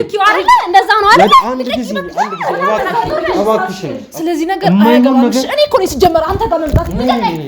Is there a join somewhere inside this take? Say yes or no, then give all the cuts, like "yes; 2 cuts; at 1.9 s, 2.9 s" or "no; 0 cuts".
yes; 1 cut; at 4.1 s